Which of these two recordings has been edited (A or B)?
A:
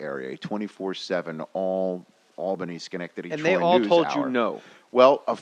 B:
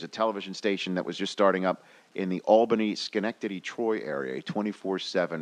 B